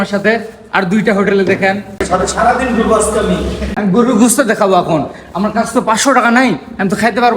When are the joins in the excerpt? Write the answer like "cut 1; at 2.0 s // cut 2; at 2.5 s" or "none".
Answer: cut 1; at 2.1 s // cut 2; at 3.7 s